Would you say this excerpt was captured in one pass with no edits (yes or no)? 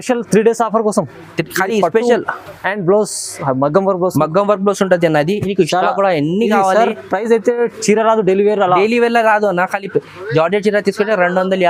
yes